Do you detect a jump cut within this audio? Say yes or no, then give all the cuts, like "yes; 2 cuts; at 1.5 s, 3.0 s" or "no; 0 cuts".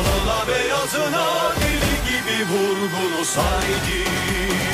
no; 0 cuts